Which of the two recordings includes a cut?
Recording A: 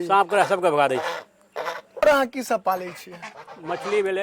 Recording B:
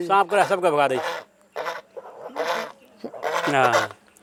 A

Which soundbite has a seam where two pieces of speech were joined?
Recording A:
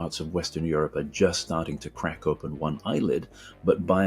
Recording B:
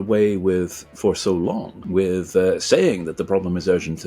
B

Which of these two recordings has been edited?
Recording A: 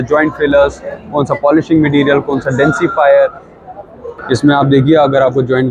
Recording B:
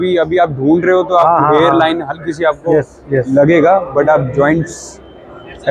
A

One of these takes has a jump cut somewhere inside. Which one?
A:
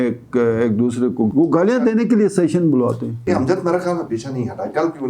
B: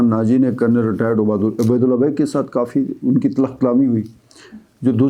A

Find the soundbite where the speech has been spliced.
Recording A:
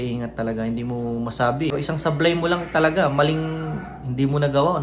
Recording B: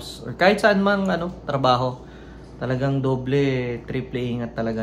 A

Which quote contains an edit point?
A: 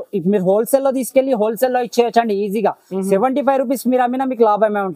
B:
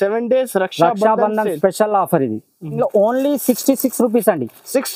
B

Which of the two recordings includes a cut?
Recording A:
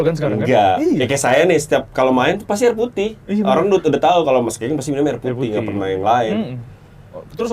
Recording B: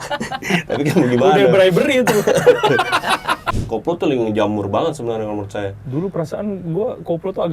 B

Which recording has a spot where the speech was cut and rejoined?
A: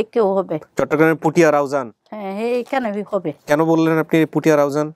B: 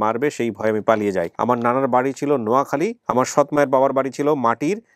B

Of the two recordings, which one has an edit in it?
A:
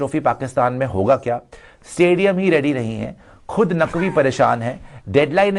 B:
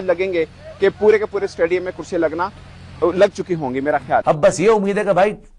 B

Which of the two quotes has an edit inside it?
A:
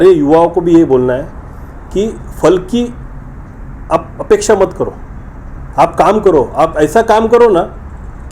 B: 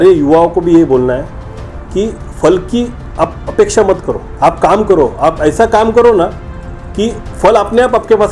B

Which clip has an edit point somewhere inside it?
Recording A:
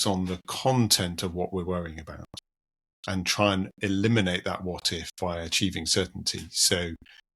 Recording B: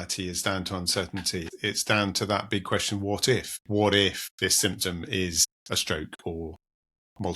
B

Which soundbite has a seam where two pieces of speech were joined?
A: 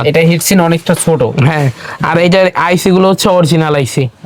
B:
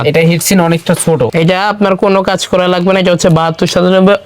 B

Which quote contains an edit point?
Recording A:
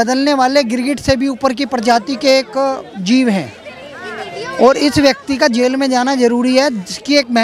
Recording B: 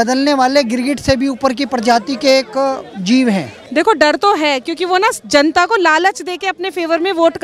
B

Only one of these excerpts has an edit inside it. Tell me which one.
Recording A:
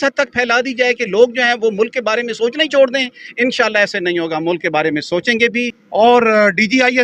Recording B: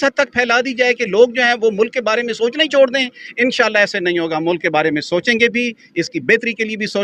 A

